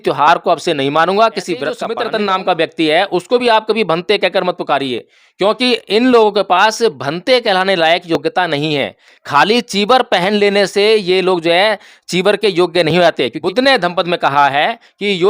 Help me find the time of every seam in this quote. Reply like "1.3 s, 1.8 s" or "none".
1.9 s, 13.4 s